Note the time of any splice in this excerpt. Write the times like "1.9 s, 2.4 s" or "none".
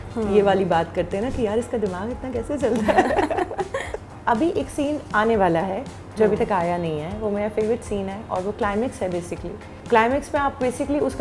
3.9 s, 9.7 s